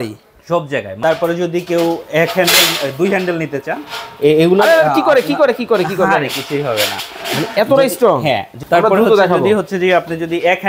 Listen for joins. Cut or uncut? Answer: cut